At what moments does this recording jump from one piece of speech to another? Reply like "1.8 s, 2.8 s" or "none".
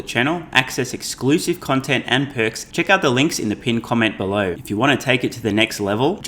2.6 s, 4.6 s